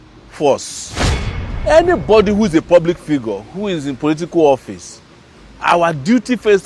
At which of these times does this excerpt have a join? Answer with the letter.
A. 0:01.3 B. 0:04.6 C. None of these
A